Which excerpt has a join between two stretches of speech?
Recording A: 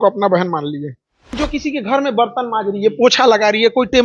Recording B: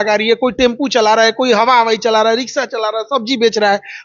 A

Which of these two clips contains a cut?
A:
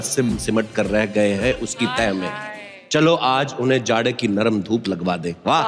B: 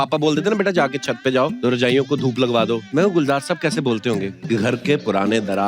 B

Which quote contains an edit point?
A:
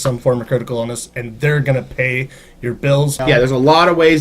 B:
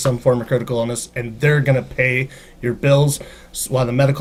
A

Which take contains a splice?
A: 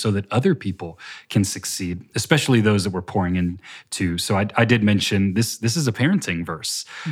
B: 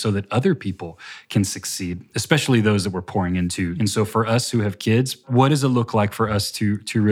B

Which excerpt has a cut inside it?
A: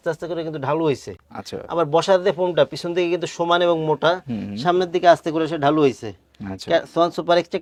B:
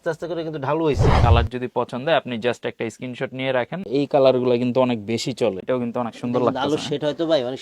B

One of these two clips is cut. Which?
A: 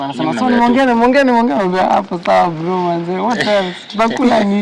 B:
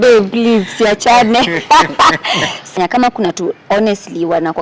B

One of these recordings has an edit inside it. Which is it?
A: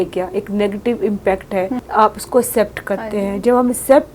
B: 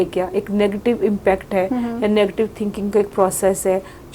A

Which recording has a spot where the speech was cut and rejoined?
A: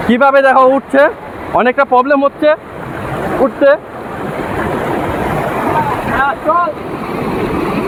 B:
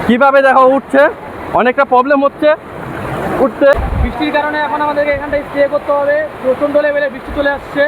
B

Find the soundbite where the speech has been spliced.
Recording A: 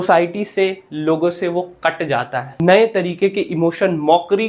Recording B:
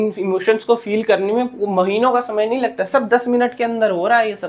A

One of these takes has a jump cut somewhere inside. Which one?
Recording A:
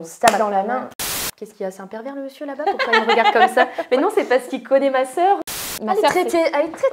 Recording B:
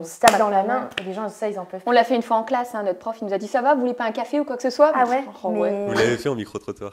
A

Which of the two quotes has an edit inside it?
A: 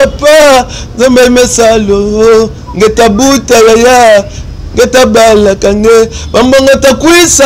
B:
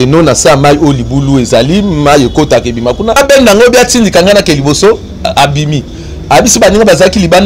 B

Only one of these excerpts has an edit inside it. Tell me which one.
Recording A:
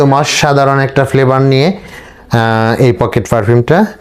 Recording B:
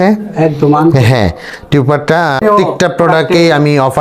B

